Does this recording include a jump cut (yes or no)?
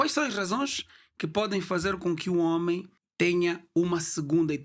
no